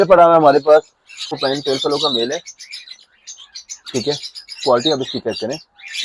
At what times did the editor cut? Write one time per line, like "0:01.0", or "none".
0:01.4

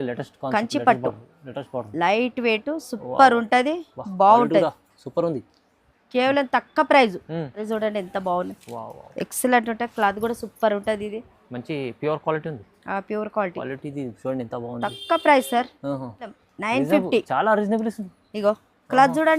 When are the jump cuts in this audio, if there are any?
0:07.6
0:16.3

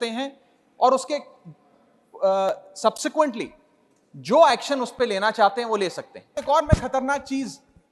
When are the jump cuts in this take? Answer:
0:06.4

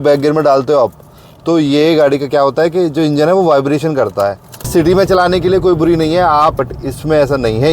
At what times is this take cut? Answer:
0:04.7
0:06.6

